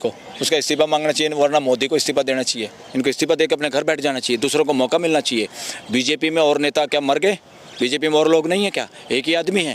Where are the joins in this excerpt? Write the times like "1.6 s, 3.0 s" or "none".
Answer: 2.8 s